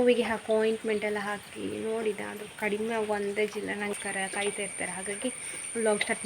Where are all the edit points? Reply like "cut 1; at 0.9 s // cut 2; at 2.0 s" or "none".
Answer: cut 1; at 3.9 s